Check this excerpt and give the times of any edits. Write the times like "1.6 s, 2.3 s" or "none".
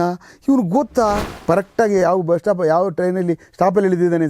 1.3 s